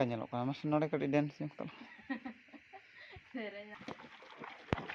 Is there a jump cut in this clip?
yes; 1 cut; at 3.7 s

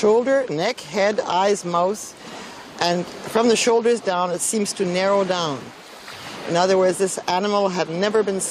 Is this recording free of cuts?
no; 1 cut; at 3.2 s

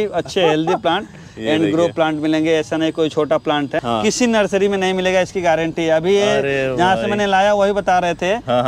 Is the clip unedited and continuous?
no; 1 cut; at 3.8 s

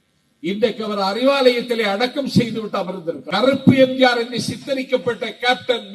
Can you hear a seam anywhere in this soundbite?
yes; 1 cut; at 3.2 s

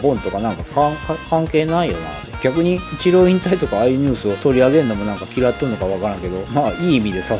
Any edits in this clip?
yes; 3 cuts; at 2.9 s, 4.3 s, 6.4 s

